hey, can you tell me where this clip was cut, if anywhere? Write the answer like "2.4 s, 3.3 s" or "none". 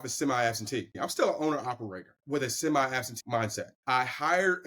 1.0 s, 2.2 s, 3.2 s